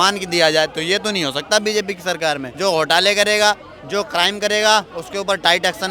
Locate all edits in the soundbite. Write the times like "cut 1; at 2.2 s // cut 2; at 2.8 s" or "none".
cut 1; at 2.5 s